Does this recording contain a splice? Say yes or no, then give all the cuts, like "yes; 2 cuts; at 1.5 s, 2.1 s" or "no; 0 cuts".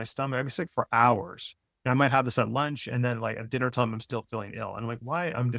no; 0 cuts